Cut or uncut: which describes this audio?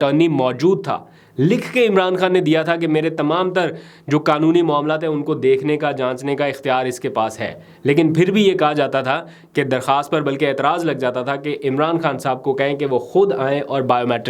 uncut